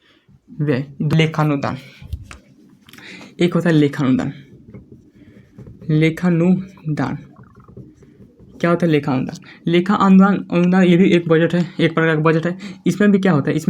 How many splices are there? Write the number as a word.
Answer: one